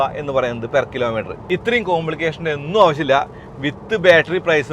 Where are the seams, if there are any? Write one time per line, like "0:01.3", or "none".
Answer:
0:01.4